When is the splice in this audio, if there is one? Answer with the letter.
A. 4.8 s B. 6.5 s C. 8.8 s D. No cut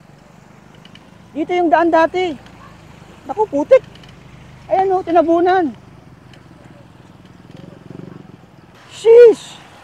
C